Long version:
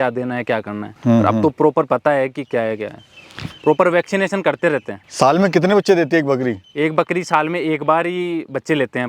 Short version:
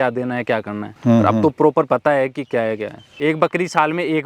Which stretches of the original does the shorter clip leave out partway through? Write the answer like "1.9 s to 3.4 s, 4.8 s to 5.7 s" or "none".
3.1 s to 6.6 s